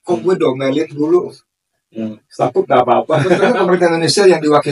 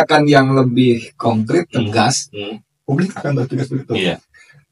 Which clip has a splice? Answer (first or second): first